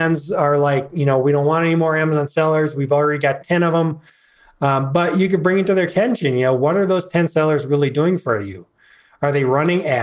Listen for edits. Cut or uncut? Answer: uncut